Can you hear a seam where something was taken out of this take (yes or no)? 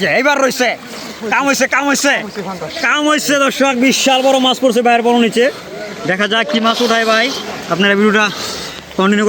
no